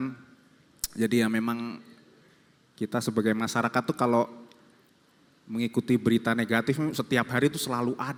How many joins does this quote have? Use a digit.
0